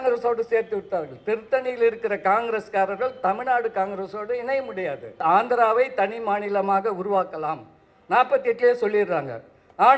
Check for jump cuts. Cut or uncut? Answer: cut